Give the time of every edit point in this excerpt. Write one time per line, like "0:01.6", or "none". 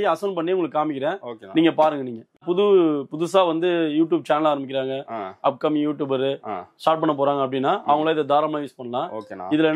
0:02.4